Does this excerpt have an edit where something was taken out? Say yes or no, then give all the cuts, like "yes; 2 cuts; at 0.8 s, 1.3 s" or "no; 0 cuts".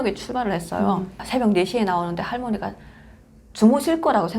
yes; 1 cut; at 1.2 s